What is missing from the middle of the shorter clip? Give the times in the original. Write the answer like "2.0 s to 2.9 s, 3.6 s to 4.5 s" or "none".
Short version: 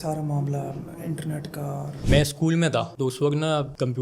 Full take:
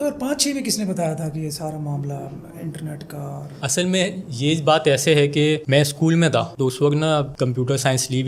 3.6 s to 5.6 s